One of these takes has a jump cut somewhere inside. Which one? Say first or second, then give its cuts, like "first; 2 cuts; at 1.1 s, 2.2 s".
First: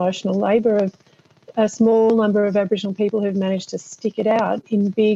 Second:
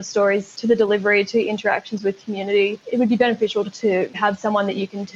second; 2 cuts; at 2.8 s, 4.0 s